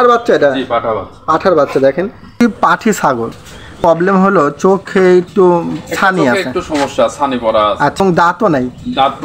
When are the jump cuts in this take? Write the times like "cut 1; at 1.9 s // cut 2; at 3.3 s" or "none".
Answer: cut 1; at 2.4 s // cut 2; at 3.8 s // cut 3; at 8.0 s